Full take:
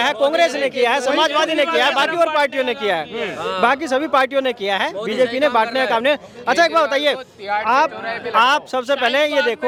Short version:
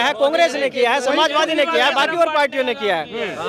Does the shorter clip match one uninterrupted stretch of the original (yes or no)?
yes